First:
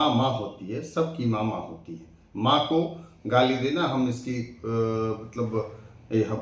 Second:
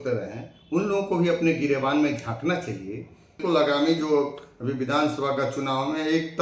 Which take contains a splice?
second; 1 cut; at 3.4 s

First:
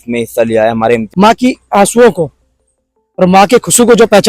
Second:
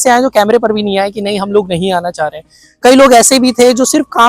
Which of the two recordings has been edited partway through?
first; 1 cut; at 1.0 s

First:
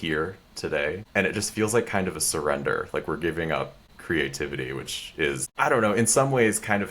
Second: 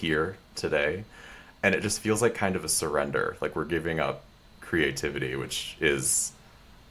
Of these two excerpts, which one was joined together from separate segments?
first; 3 cuts; at 1.0 s, 3.9 s, 5.5 s

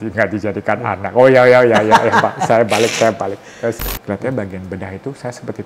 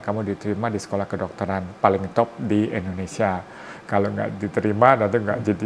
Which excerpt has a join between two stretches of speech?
first; 1 cut; at 3.9 s

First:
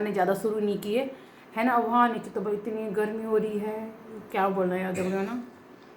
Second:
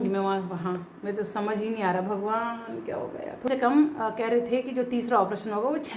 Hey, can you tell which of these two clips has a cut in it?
second; 1 cut; at 3.5 s

